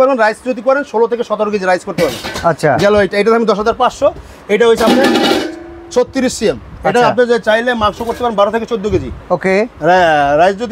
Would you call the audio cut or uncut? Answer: uncut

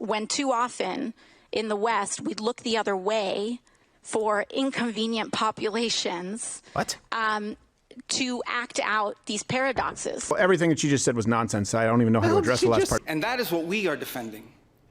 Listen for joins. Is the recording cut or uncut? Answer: cut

